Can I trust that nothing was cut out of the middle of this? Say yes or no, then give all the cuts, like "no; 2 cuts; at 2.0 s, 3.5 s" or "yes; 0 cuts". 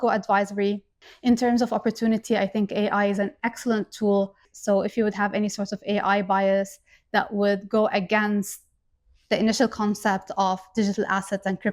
no; 2 cuts; at 1.1 s, 4.5 s